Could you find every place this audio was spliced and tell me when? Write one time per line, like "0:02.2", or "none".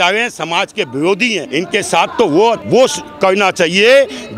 0:01.5
0:02.6